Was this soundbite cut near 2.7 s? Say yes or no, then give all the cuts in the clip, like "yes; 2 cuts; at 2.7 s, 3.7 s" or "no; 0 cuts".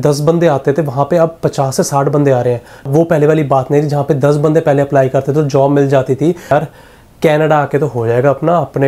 yes; 2 cuts; at 2.7 s, 6.5 s